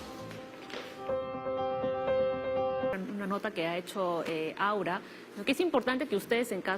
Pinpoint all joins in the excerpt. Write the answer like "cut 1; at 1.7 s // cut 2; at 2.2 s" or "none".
cut 1; at 2.9 s